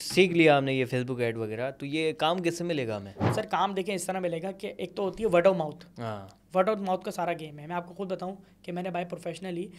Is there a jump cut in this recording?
no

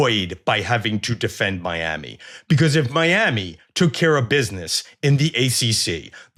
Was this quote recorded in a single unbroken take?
yes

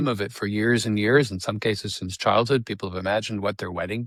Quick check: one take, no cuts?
yes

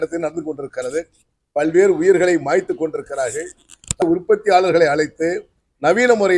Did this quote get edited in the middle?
yes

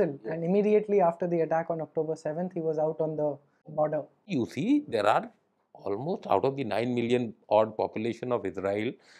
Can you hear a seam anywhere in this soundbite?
yes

